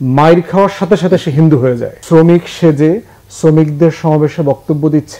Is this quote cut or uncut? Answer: cut